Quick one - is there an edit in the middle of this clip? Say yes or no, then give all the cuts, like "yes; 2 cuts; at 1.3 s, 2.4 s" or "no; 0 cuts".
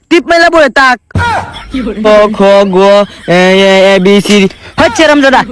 yes; 1 cut; at 2.1 s